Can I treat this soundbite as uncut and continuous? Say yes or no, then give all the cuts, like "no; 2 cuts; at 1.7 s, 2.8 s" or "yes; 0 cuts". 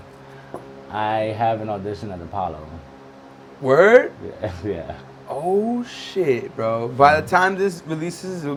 yes; 0 cuts